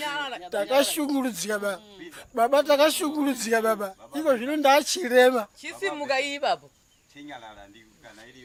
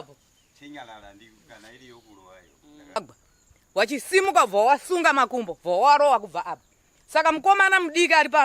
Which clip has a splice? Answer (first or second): second